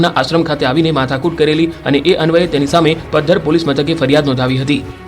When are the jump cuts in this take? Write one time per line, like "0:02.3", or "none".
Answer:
0:03.0

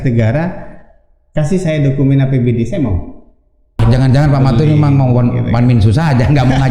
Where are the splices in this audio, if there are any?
0:03.8

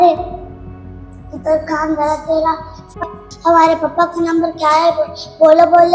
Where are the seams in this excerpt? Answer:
0:03.0

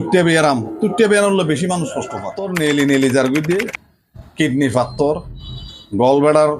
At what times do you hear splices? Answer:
0:02.4

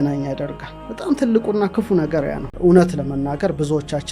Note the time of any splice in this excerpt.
0:02.5

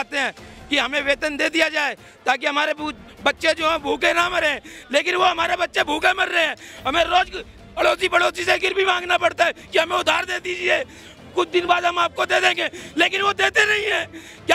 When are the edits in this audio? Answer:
none

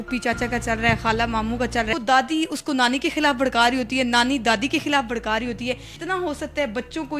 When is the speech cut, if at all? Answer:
0:01.9
0:06.0

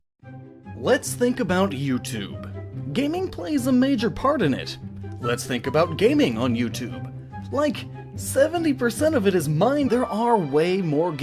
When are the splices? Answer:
none

